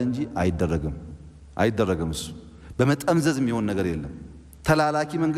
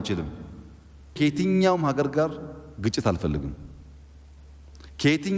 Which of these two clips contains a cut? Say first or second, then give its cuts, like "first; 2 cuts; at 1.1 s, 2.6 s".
second; 1 cut; at 1.1 s